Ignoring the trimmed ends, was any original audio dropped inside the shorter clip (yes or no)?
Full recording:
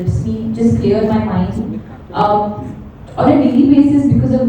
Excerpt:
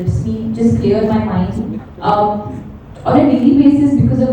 yes